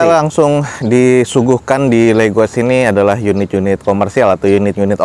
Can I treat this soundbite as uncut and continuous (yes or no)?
yes